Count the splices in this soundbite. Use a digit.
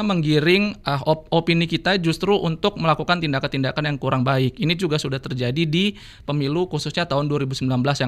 0